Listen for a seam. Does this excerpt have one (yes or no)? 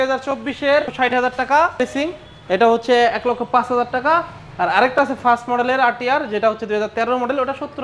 yes